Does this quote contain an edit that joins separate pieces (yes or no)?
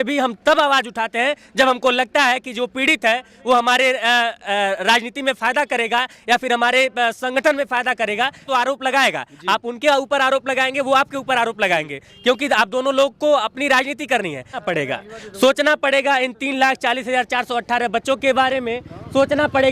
yes